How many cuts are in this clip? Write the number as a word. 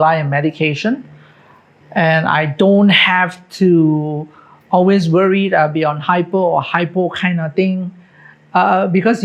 zero